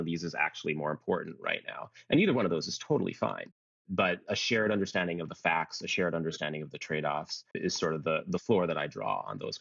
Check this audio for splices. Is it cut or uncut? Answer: cut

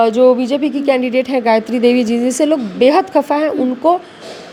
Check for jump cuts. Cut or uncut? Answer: uncut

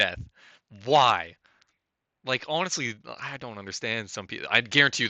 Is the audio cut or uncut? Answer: uncut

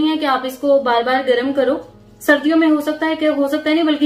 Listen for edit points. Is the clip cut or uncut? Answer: uncut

